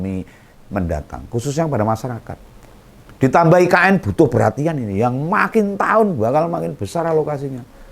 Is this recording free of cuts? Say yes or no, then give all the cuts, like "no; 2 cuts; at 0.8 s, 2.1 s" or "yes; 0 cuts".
yes; 0 cuts